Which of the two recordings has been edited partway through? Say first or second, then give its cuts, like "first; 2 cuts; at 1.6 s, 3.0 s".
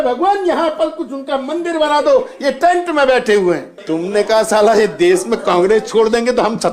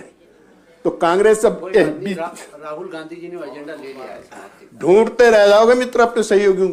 first; 1 cut; at 3.7 s